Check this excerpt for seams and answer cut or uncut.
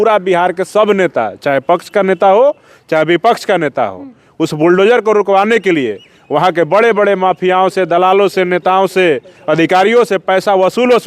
uncut